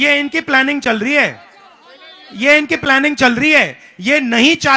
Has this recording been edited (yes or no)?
no